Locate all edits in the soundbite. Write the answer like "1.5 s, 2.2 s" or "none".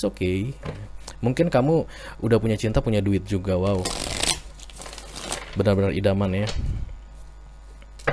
none